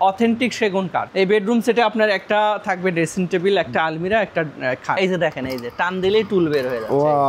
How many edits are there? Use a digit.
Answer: 2